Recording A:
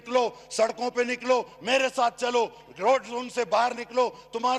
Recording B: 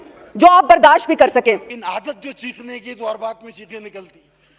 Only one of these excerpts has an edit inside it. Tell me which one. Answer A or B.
B